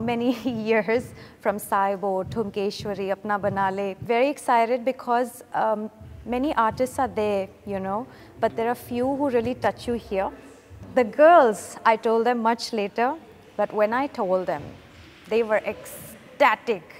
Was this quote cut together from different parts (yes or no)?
yes